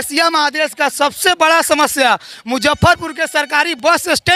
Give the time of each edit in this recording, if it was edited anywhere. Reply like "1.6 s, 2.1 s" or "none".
none